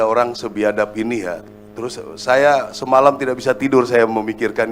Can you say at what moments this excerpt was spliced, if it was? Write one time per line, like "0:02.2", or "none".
0:01.5

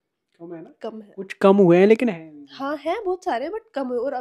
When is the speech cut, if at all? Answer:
none

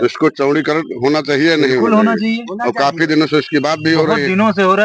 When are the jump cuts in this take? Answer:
none

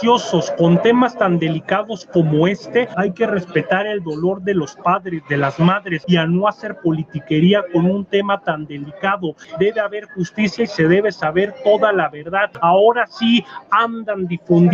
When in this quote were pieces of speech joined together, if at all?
0:02.9
0:06.0
0:09.5
0:12.5

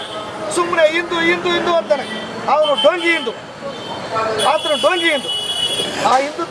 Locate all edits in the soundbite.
none

